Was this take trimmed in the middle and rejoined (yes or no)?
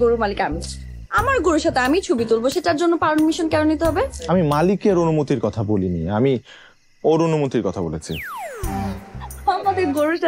no